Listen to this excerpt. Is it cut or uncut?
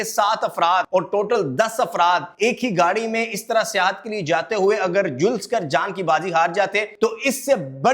cut